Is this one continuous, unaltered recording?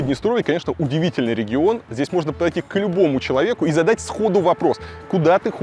yes; 0 cuts

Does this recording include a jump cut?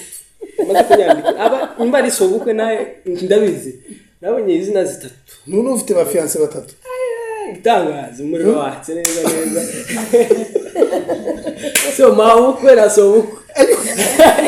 no; 0 cuts

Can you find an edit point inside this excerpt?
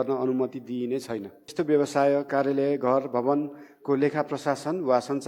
yes; 1 cut; at 1.4 s

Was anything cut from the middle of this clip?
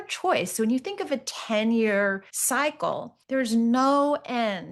yes; 2 cuts; at 2.3 s, 3.1 s

